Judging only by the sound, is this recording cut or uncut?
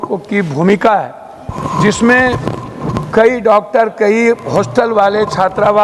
uncut